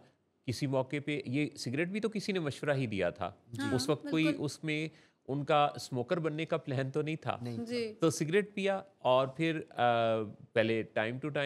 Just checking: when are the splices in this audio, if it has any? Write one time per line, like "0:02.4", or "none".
none